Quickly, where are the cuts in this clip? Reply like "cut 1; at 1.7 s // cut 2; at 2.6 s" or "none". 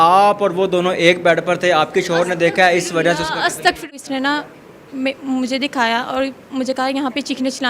cut 1; at 3.9 s